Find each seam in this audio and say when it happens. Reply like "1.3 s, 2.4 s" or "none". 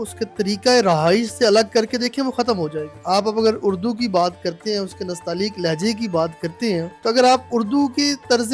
2.9 s, 6.9 s